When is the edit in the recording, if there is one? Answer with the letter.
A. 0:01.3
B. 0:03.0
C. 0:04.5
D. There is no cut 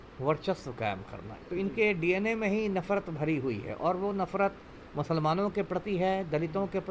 A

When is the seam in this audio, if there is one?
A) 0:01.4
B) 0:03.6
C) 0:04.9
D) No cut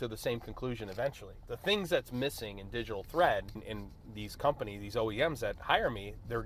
B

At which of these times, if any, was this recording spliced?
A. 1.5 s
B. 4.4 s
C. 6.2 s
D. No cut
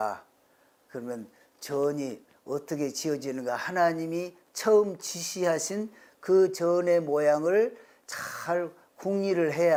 D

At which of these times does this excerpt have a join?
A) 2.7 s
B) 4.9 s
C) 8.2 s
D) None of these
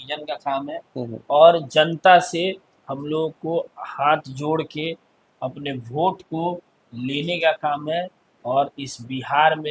D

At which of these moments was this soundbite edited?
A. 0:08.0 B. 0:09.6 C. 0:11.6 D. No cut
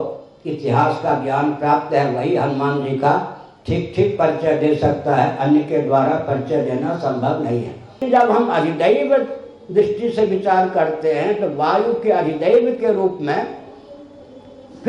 A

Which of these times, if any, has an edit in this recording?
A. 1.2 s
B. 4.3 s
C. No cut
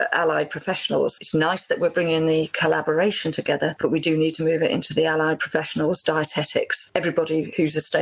A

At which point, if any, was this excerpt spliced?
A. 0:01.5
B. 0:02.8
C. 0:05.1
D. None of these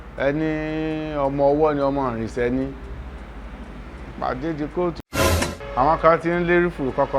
C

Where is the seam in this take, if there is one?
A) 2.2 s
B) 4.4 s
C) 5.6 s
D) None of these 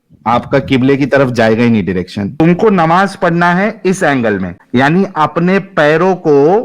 A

